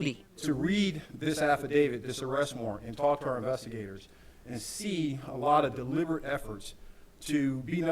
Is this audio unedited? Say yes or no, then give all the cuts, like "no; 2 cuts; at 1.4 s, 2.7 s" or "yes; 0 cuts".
no; 1 cut; at 1.9 s